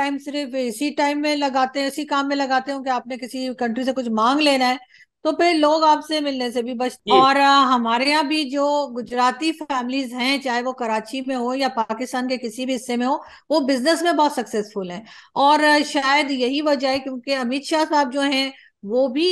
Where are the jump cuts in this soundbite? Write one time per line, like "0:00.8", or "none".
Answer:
0:06.9